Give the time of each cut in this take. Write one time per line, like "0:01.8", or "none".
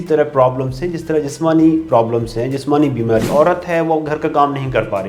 0:03.3